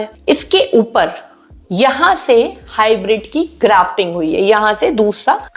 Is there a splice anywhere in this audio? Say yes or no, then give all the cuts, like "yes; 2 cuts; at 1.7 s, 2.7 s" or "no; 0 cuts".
no; 0 cuts